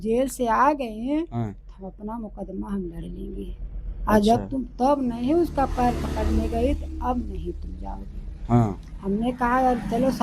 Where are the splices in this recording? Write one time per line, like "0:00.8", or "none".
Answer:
none